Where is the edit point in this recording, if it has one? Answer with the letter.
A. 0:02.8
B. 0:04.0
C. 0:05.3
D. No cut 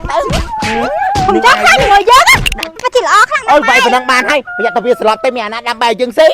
A